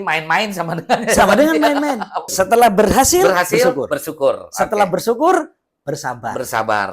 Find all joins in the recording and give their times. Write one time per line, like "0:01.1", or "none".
0:02.3